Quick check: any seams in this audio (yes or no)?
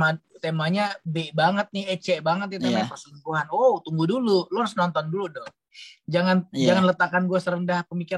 no